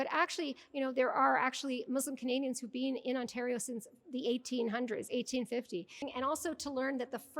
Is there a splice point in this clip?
yes; 1 cut; at 6.0 s

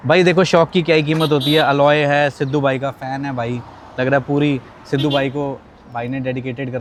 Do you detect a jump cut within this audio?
no; 0 cuts

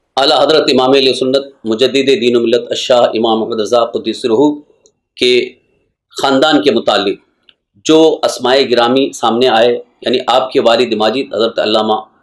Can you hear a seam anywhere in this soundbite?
no; 0 cuts

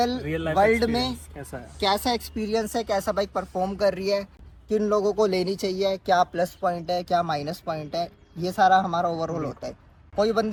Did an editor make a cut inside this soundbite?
no; 0 cuts

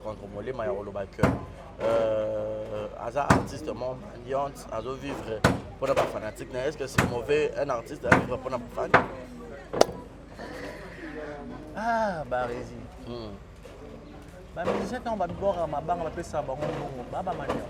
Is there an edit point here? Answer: no; 0 cuts

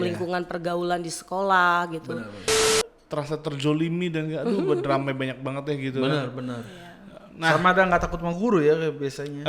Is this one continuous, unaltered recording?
no; 1 cut; at 2.6 s

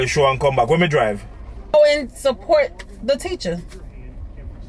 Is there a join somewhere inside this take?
yes; 1 cut; at 1.7 s

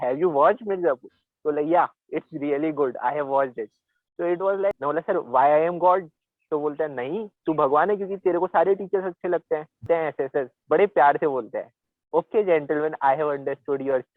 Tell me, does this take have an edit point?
yes; 2 cuts; at 4.8 s, 9.9 s

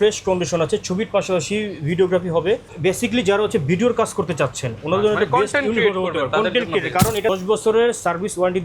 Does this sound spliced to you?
yes; 2 cuts; at 2.7 s, 7.3 s

